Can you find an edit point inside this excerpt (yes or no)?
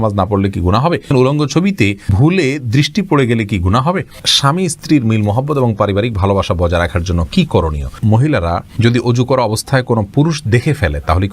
yes